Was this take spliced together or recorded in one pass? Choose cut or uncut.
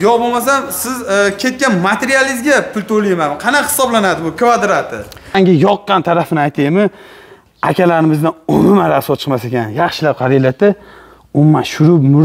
cut